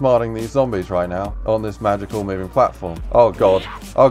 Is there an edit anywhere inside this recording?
yes; 2 cuts; at 1.3 s, 2.9 s

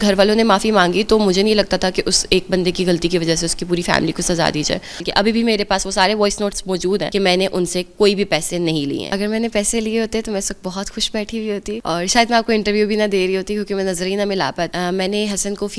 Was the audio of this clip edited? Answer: yes; 5 cuts; at 5.0 s, 7.1 s, 9.1 s, 11.8 s, 14.7 s

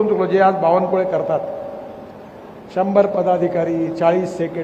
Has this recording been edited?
no; 0 cuts

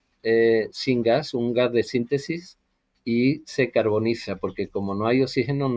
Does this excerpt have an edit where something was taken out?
no; 0 cuts

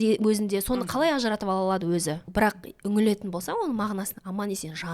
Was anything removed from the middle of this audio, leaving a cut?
yes; 1 cut; at 2.3 s

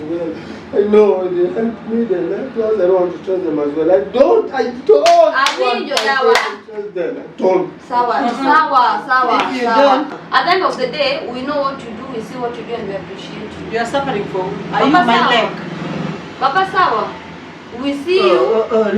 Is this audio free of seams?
no; 1 cut; at 10.2 s

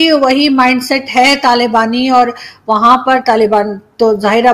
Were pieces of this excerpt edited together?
no; 0 cuts

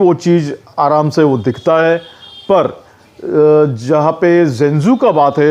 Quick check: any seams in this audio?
no; 0 cuts

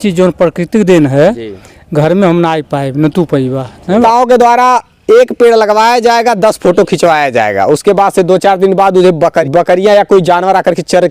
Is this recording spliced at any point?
yes; 2 cuts; at 4.0 s, 9.4 s

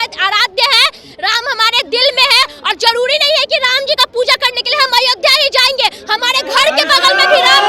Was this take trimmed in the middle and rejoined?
no; 0 cuts

